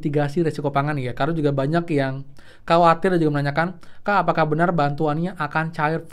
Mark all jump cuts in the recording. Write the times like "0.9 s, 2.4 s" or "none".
none